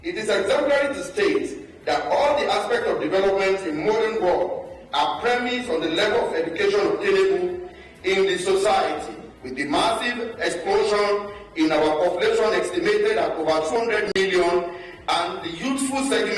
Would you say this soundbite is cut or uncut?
cut